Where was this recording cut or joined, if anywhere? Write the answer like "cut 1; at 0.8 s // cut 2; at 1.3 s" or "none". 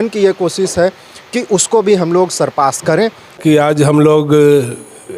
cut 1; at 3.3 s